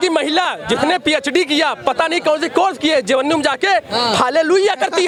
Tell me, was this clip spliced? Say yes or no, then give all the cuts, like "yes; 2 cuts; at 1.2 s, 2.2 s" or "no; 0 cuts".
no; 0 cuts